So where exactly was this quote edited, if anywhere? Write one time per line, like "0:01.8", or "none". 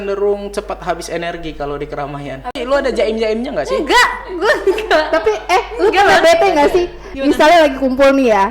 0:02.6